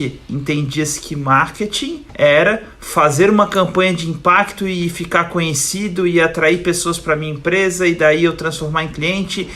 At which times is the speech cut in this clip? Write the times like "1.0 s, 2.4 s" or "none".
2.0 s